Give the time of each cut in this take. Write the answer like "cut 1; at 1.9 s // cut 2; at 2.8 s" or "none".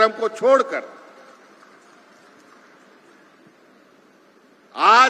none